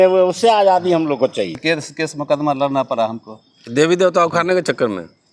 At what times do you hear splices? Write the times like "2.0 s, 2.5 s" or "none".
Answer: 1.6 s